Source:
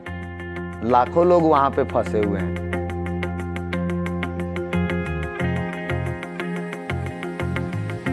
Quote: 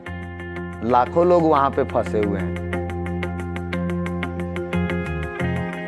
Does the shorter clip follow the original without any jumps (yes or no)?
yes